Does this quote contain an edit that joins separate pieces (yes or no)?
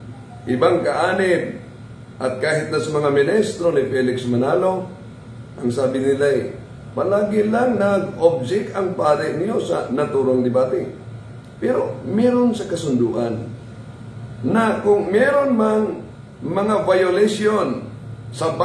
no